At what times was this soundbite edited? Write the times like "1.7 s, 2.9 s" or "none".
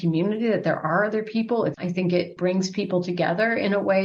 1.8 s